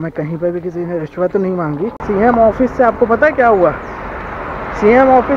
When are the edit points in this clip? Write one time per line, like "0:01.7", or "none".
0:02.0